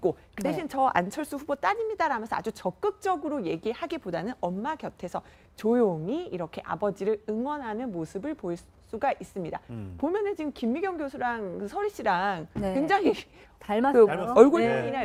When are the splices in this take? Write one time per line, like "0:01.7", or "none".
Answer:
none